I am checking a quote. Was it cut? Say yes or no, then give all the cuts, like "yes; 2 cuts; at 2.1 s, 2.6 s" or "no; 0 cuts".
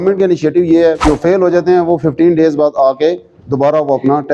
yes; 1 cut; at 1.0 s